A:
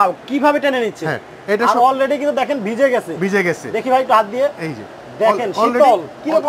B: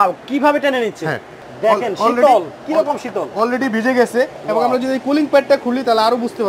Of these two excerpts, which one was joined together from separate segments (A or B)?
B